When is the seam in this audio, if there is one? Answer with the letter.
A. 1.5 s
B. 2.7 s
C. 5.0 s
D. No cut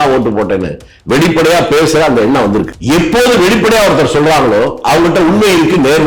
B